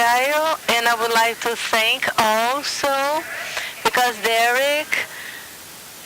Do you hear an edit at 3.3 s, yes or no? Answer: yes